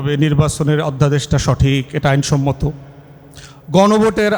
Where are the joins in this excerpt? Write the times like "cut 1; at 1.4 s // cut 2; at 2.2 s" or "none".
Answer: none